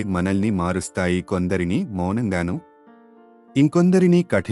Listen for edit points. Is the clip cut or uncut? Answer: uncut